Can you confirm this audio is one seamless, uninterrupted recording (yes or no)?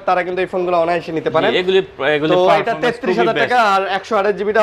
yes